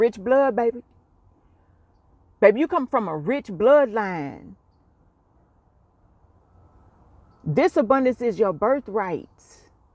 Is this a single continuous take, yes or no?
yes